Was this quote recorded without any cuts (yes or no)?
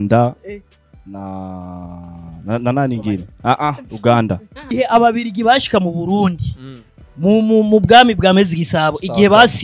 no